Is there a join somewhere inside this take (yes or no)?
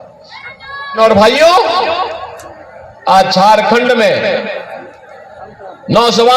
yes